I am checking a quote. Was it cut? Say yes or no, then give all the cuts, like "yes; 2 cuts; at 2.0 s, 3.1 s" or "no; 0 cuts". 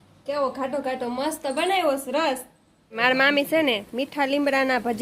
yes; 1 cut; at 3.0 s